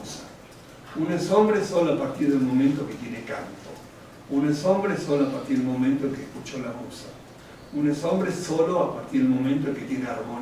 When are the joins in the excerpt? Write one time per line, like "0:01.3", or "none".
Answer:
0:03.6